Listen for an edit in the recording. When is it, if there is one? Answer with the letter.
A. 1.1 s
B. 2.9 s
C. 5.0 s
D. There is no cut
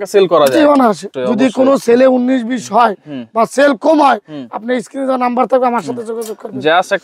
A